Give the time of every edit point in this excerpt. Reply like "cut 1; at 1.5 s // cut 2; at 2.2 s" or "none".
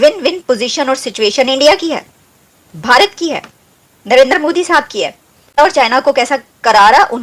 cut 1; at 5.6 s